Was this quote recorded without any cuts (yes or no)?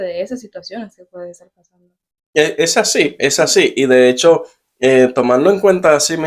yes